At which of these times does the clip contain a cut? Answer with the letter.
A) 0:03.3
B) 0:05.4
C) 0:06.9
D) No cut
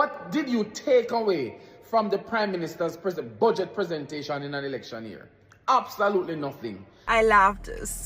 C